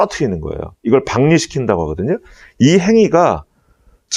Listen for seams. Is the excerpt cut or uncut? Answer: uncut